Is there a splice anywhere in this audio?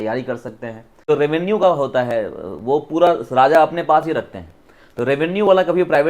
yes; 1 cut; at 1.1 s

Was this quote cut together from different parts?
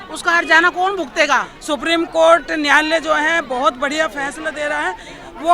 yes; 1 cut; at 1.5 s

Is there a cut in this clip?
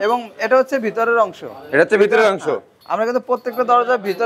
no; 0 cuts

